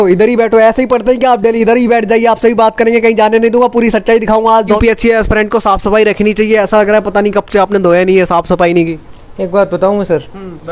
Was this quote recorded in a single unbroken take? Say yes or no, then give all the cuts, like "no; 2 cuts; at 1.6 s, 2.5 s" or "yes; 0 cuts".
no; 1 cut; at 4.8 s